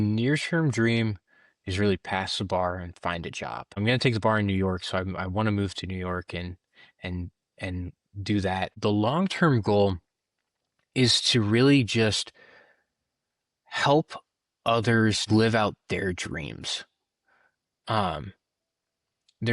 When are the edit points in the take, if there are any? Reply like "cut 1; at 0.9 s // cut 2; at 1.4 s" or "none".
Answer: cut 1; at 8.7 s